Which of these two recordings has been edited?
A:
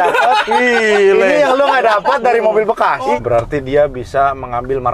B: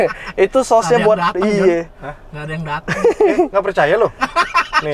A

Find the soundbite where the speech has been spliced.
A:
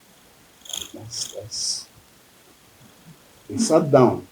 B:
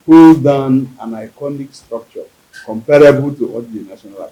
A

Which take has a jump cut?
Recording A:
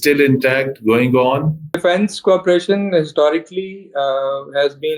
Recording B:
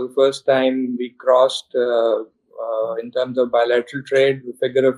A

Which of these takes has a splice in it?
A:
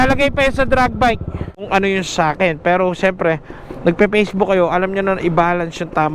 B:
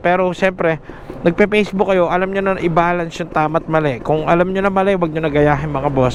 A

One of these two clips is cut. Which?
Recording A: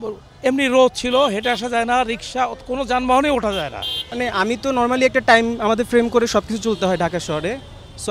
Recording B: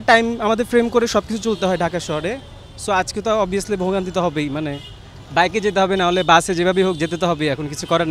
A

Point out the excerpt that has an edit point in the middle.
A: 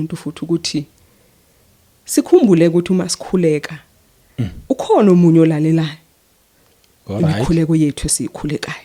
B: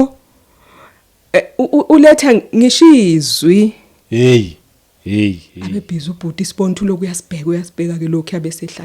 B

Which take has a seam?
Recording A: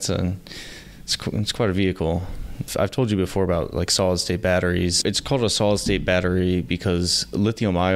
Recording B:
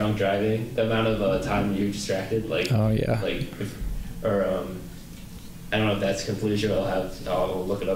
A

